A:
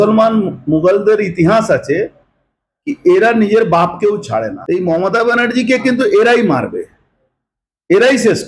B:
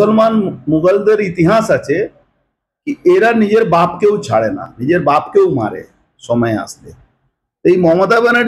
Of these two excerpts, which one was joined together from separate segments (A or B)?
A